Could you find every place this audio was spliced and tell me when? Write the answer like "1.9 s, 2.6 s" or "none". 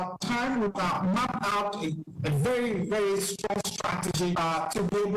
0.7 s, 3.9 s